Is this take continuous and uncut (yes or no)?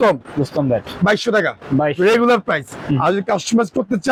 yes